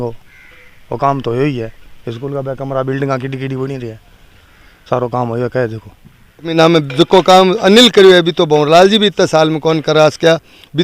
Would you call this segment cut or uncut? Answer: cut